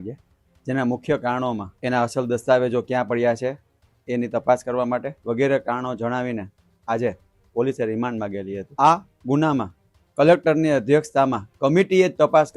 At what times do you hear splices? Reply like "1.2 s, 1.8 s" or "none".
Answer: 1.7 s, 5.1 s, 8.7 s